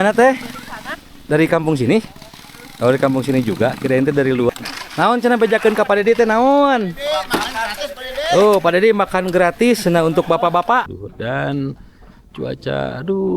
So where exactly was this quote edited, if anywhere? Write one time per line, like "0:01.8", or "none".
0:04.5
0:10.9